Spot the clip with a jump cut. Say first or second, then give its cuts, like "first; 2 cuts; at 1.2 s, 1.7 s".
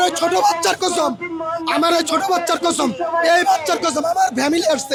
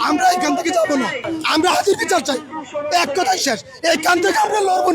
second; 1 cut; at 1.3 s